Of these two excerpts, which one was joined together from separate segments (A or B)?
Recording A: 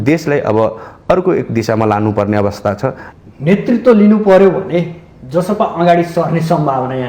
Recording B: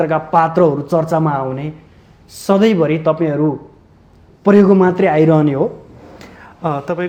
A